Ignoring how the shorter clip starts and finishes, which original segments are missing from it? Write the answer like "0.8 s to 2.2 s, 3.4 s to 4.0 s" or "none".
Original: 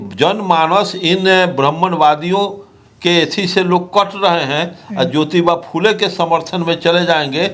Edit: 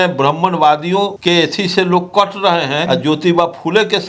2.5 s to 2.9 s, 4.6 s to 4.9 s